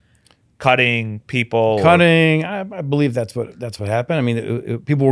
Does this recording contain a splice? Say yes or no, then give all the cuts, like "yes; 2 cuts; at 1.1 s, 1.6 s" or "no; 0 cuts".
no; 0 cuts